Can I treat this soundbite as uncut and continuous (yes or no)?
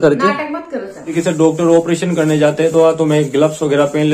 no